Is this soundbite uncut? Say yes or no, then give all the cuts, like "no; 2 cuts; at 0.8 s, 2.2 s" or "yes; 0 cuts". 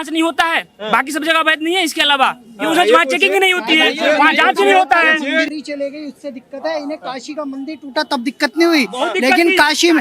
no; 1 cut; at 5.5 s